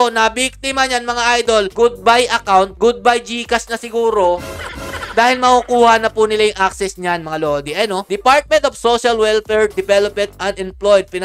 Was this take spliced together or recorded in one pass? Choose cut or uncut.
uncut